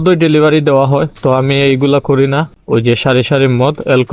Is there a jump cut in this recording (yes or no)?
no